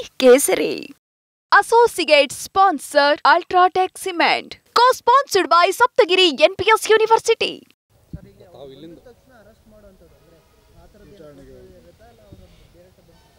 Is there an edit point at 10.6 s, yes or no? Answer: no